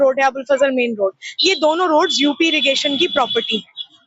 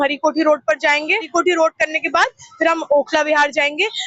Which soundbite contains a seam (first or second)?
second